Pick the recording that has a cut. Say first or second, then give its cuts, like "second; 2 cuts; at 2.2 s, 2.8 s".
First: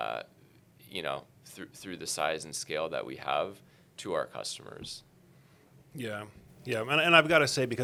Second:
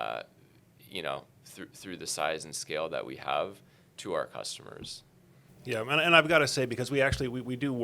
second; 1 cut; at 5.4 s